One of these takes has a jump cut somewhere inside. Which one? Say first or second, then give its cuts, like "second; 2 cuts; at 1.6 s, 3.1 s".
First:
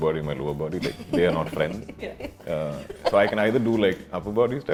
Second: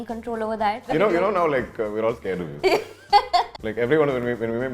second; 2 cuts; at 0.8 s, 3.6 s